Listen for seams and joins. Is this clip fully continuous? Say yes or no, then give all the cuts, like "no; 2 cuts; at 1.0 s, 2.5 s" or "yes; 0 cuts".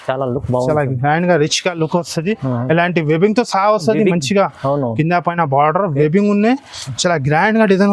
yes; 0 cuts